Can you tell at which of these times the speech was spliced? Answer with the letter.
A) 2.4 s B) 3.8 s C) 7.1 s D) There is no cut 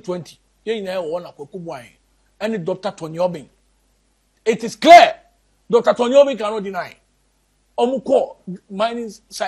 D